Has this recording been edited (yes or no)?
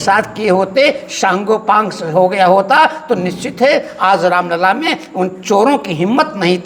no